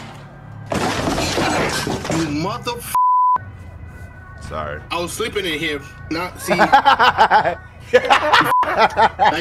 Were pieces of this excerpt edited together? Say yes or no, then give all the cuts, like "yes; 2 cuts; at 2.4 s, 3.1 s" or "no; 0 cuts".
no; 0 cuts